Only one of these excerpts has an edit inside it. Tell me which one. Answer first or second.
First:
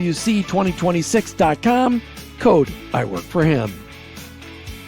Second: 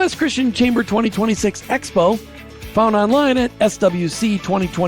first